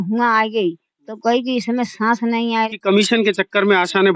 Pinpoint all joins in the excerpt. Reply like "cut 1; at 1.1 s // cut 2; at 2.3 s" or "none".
cut 1; at 2.7 s